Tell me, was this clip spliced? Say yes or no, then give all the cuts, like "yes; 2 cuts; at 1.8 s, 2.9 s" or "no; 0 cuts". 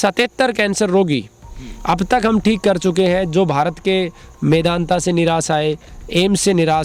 no; 0 cuts